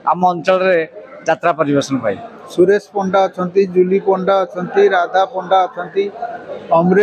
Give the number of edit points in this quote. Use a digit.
1